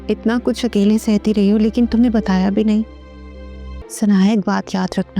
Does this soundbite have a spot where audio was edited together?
yes; 1 cut; at 3.8 s

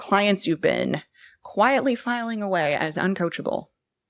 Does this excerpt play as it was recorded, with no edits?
yes; 0 cuts

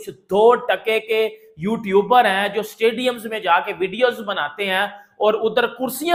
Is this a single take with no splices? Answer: yes; 0 cuts

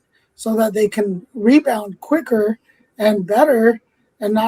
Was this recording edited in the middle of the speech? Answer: no; 0 cuts

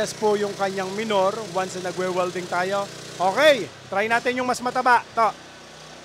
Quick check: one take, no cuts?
yes; 0 cuts

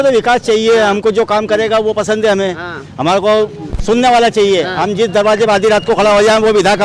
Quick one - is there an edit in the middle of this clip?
no; 0 cuts

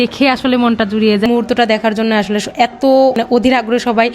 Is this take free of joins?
no; 1 cut; at 1.3 s

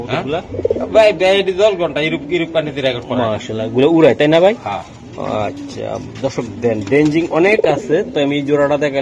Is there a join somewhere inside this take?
no; 0 cuts

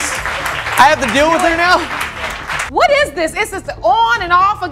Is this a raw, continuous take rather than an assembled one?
no; 1 cut; at 2.7 s

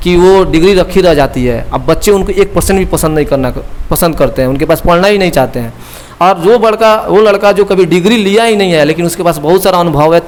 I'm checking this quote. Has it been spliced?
no; 0 cuts

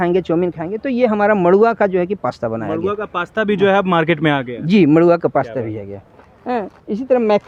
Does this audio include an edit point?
no; 0 cuts

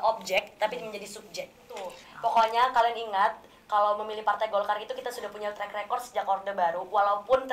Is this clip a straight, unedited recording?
no; 1 cut; at 2.0 s

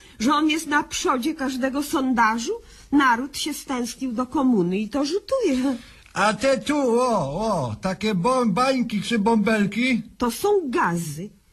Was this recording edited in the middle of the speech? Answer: yes; 1 cut; at 3.2 s

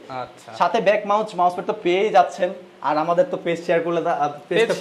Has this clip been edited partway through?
no; 0 cuts

